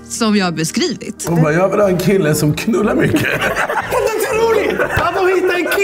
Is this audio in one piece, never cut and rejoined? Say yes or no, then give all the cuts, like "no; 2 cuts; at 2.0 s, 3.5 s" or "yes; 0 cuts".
no; 2 cuts; at 1.1 s, 3.8 s